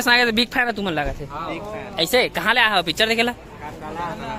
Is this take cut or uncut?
uncut